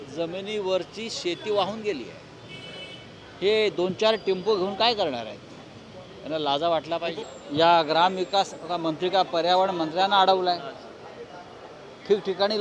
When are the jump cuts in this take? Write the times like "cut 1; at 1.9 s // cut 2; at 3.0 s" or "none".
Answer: cut 1; at 7.3 s